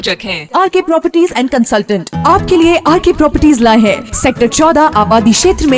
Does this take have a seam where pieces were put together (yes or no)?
no